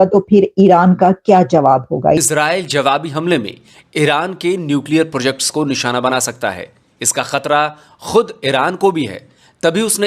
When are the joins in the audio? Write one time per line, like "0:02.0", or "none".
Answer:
0:02.1